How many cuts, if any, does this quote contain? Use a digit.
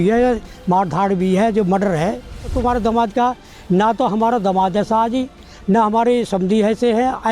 1